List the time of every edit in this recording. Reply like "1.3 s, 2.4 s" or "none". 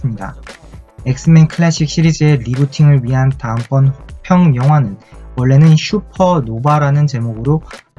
3.4 s